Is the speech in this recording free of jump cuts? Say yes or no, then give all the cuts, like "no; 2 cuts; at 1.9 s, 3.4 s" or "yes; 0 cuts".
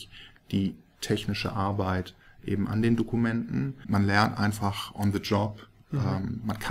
no; 1 cut; at 3.8 s